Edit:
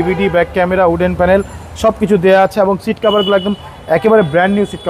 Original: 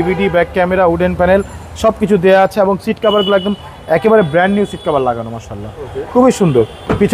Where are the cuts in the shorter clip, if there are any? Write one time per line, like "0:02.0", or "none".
none